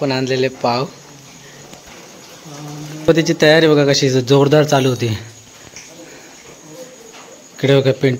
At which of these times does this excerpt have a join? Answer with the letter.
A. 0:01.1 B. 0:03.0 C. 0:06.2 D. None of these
B